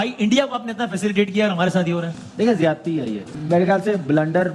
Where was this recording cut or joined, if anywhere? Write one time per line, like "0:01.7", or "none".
0:03.3